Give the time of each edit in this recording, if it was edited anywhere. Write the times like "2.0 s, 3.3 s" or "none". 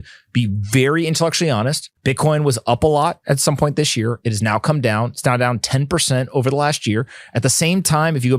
1.9 s